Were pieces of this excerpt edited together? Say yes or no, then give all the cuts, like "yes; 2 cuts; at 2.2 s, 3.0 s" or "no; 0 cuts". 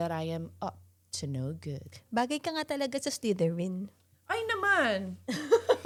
no; 0 cuts